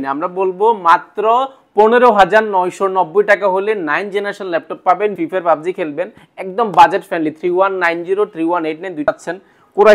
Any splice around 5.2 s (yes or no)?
yes